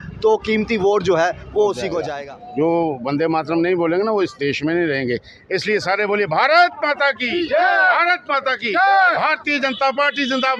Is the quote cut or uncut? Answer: cut